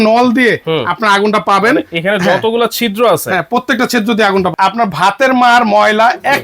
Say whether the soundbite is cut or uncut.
cut